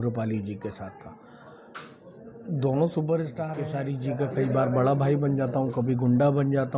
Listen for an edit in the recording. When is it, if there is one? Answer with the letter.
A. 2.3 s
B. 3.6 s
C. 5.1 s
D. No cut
B